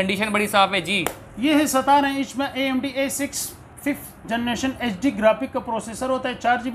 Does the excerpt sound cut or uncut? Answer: uncut